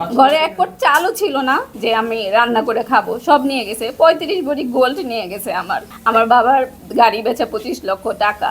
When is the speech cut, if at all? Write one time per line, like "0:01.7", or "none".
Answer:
0:01.7
0:05.9